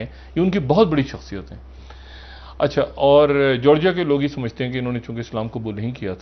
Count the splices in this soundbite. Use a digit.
0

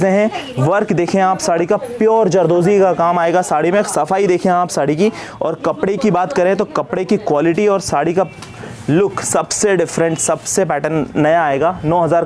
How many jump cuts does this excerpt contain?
0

